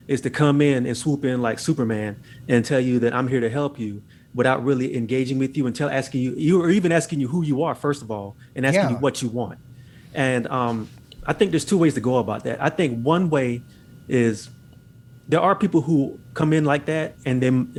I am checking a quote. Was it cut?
no; 0 cuts

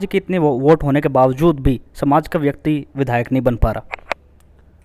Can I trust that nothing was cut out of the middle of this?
yes; 0 cuts

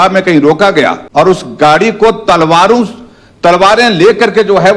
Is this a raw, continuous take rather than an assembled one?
no; 1 cut; at 1.0 s

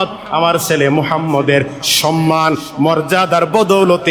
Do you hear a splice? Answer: no; 0 cuts

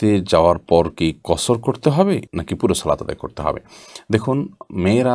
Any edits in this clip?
no; 0 cuts

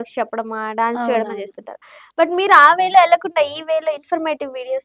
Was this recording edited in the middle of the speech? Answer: no; 0 cuts

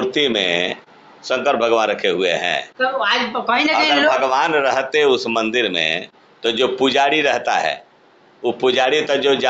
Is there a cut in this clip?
no; 0 cuts

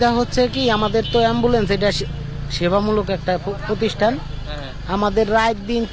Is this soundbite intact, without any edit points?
yes; 0 cuts

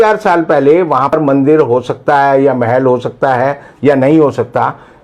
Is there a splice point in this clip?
yes; 1 cut; at 1.1 s

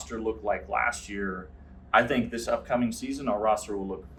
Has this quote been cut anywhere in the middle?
no; 0 cuts

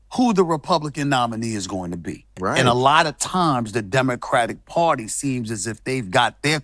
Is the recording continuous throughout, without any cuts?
no; 1 cut; at 2.3 s

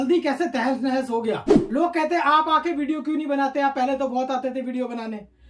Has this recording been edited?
yes; 1 cut; at 1.5 s

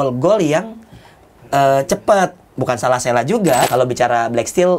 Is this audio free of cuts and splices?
no; 1 cut; at 3.7 s

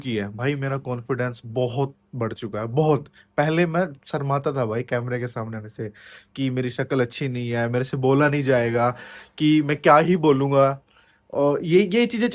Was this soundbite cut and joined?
no; 0 cuts

